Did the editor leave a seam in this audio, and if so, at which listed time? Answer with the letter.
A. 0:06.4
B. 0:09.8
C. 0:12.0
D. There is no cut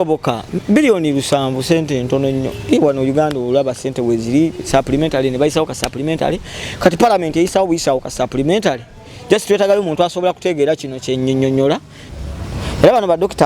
C